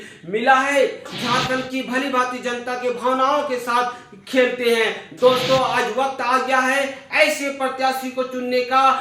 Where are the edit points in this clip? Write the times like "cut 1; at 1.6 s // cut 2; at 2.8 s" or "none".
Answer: cut 1; at 1.1 s